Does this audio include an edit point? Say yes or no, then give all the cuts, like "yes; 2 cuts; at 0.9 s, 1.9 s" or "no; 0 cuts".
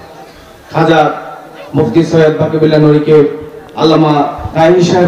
no; 0 cuts